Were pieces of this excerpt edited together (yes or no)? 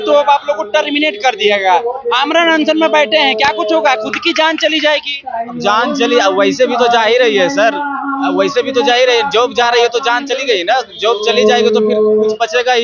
no